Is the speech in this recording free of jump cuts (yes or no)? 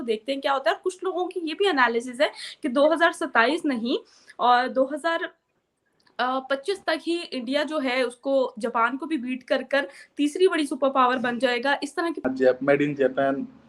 no